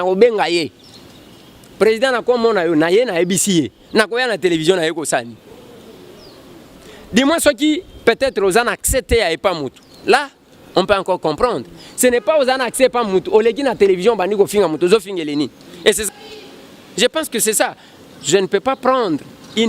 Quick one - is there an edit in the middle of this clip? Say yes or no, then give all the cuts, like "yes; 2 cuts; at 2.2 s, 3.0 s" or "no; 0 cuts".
yes; 1 cut; at 16.0 s